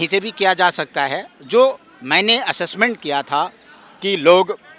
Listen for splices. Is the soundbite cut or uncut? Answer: uncut